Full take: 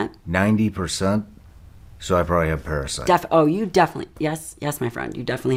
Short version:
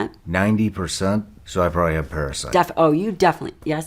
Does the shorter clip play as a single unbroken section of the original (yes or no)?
no